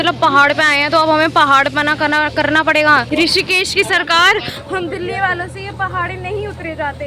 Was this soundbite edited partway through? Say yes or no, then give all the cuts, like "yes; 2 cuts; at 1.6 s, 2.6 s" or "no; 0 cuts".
yes; 1 cut; at 3.1 s